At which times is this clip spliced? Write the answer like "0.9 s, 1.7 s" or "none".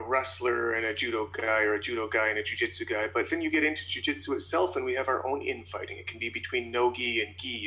none